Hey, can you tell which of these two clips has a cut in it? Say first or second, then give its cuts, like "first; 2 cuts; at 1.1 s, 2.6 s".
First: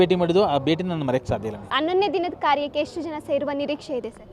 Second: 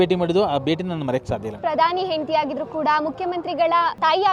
second; 1 cut; at 1.5 s